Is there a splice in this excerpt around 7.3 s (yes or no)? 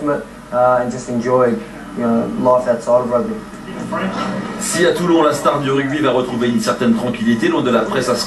yes